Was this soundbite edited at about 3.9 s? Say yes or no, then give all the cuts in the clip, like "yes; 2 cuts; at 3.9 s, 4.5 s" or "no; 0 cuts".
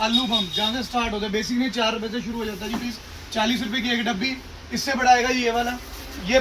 no; 0 cuts